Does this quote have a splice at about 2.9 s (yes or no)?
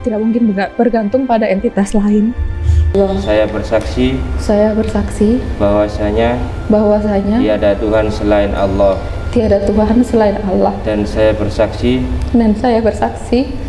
yes